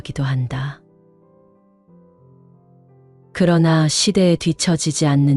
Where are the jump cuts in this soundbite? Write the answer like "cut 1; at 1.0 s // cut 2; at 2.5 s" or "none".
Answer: cut 1; at 0.8 s // cut 2; at 3.2 s